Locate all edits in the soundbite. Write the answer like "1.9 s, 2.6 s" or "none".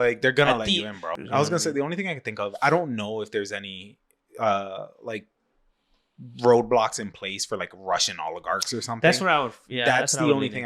1.2 s